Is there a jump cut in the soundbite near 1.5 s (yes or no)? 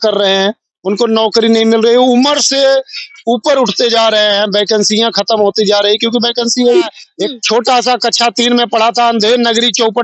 no